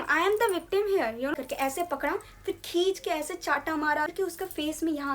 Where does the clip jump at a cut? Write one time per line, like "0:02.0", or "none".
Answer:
0:01.3
0:04.1

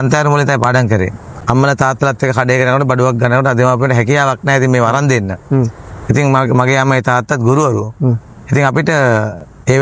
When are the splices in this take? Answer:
0:01.3

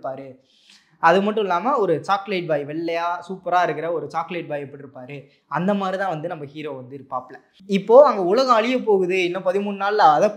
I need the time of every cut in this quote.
0:07.6

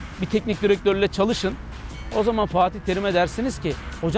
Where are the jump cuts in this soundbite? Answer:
none

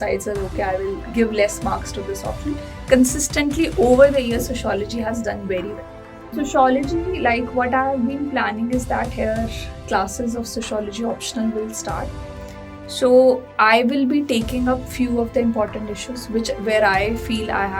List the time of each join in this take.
0:06.3

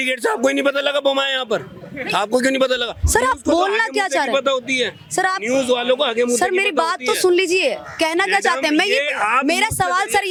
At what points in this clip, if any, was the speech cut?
none

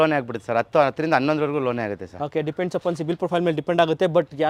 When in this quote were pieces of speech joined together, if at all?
none

